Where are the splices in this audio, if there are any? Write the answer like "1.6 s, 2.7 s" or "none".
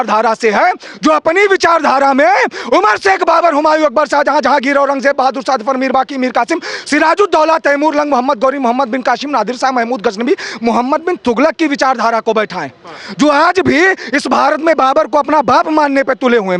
none